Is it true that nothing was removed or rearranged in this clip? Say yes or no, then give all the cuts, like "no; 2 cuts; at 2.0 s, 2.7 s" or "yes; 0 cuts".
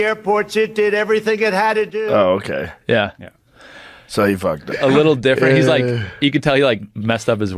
no; 1 cut; at 4.7 s